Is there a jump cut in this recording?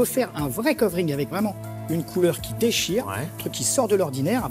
no; 0 cuts

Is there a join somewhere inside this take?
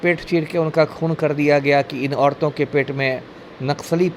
no; 0 cuts

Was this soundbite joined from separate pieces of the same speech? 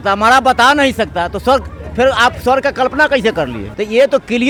no; 0 cuts

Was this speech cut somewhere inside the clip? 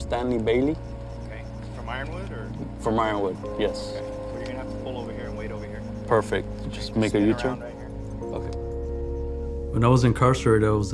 yes; 1 cut; at 7.6 s

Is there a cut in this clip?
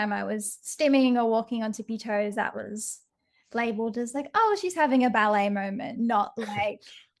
no; 0 cuts

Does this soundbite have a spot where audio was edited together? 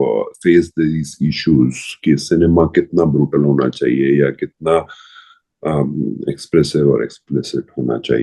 no; 0 cuts

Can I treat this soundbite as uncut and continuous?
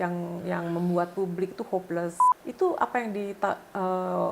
no; 1 cut; at 2.3 s

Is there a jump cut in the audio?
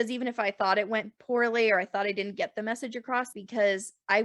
yes; 1 cut; at 3.3 s

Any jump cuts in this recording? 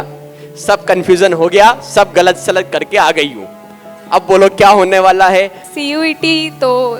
yes; 1 cut; at 5.6 s

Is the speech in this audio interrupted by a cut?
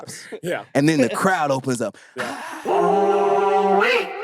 yes; 1 cut; at 2.5 s

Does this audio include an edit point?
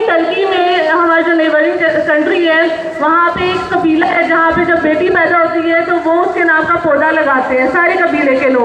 no; 0 cuts

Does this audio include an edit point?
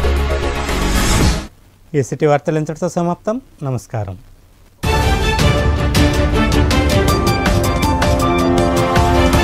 no; 0 cuts

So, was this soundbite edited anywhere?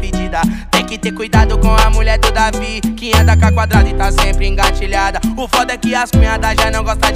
yes; 1 cut; at 0.9 s

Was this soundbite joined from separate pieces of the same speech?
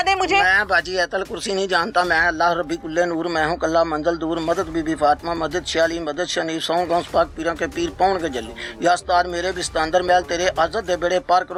no; 0 cuts

